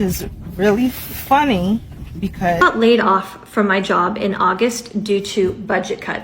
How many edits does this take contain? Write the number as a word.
one